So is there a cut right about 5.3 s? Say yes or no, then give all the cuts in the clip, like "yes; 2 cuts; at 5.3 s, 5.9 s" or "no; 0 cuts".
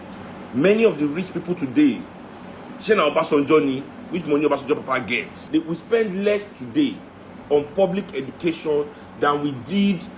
yes; 1 cut; at 5.3 s